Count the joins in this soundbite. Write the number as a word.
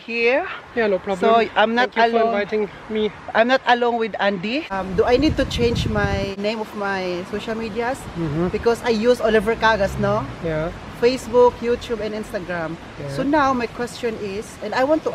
two